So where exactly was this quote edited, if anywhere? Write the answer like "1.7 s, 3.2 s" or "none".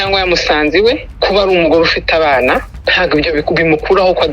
1.1 s, 2.8 s

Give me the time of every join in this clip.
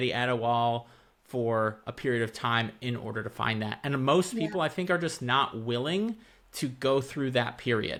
none

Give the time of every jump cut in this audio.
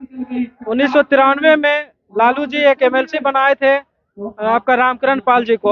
none

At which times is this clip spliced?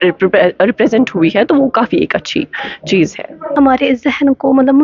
3.4 s

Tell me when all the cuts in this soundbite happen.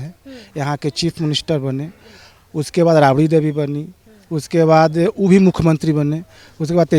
none

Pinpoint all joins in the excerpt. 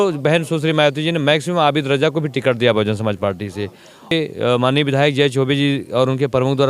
4.1 s

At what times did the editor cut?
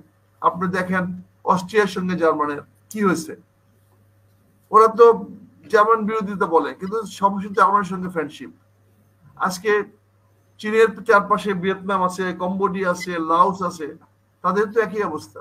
none

